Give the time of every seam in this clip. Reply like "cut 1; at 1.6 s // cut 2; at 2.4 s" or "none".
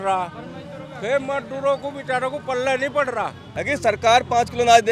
cut 1; at 3.5 s